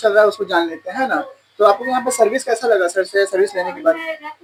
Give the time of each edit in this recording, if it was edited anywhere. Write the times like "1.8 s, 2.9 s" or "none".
none